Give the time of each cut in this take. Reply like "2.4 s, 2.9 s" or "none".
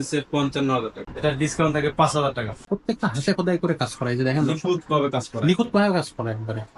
1.0 s, 2.5 s